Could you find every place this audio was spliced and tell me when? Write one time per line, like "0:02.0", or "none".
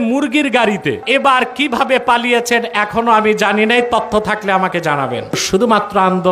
0:01.0
0:05.4